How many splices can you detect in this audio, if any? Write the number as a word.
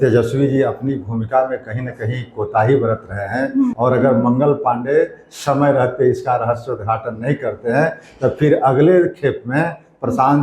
one